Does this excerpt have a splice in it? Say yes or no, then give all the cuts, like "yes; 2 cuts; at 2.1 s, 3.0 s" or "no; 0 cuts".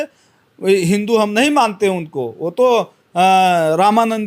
no; 0 cuts